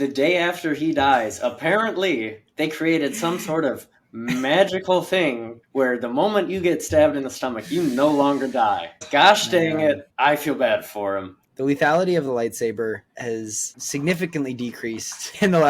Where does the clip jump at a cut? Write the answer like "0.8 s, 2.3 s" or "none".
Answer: 11.4 s